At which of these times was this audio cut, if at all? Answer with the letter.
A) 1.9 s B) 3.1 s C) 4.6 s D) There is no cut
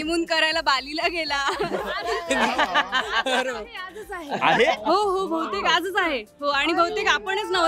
A